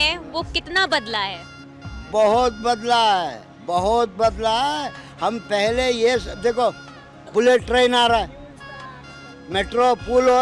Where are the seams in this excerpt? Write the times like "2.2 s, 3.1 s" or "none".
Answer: none